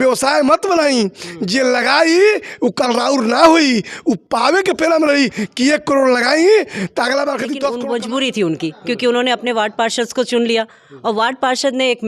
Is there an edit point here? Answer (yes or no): yes